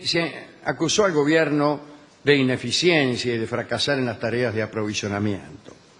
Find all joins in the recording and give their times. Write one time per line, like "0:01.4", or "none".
0:01.8